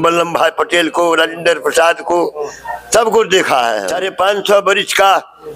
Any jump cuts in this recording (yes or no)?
yes